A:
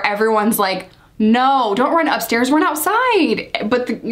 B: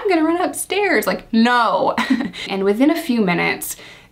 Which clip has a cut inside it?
B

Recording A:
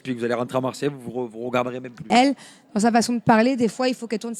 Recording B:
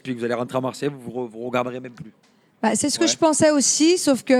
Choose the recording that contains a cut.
A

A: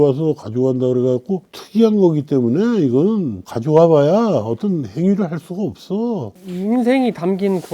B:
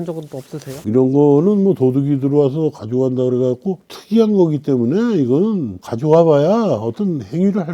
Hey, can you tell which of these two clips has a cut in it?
A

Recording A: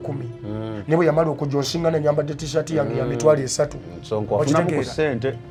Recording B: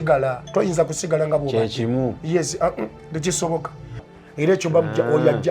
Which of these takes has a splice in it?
B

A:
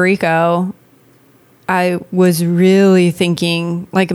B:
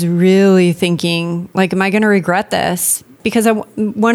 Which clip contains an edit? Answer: B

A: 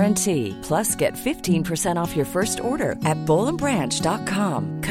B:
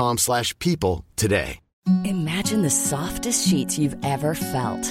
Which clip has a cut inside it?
B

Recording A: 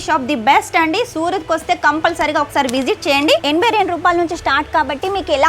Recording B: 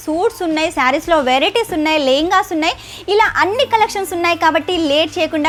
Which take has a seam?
A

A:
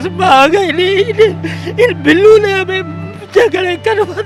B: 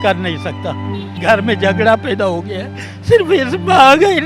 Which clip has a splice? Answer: B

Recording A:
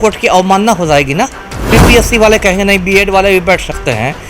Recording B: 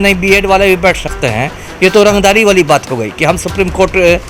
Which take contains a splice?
A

